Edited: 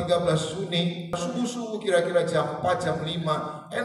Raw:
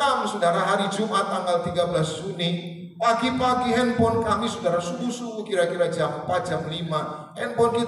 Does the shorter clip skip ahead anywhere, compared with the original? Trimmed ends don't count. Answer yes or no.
yes